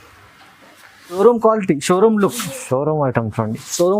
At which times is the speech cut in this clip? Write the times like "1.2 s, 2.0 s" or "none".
1.2 s